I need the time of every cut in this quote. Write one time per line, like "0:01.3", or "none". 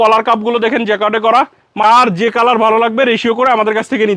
0:01.8